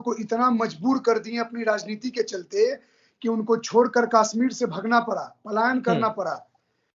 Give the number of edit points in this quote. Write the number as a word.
zero